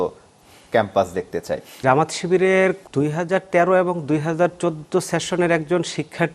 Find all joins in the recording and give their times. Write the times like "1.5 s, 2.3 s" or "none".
1.8 s, 2.8 s